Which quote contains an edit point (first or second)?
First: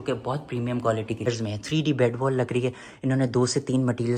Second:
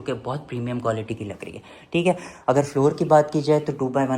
first